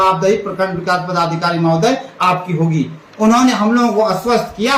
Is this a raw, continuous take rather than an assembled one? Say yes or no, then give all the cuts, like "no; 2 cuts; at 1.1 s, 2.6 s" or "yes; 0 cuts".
yes; 0 cuts